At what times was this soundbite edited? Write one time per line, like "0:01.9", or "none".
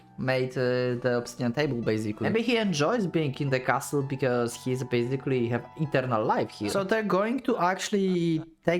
0:02.2
0:06.7